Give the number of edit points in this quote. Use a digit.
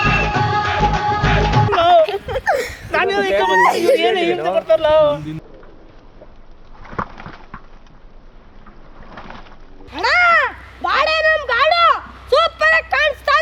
2